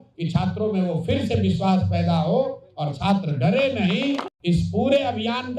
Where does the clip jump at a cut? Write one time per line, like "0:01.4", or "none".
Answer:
0:04.3